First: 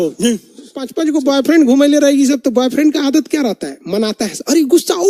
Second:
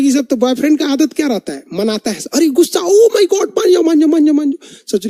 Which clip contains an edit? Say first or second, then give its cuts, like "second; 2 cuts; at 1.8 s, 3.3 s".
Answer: first; 1 cut; at 0.9 s